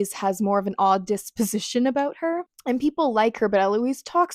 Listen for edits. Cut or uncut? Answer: uncut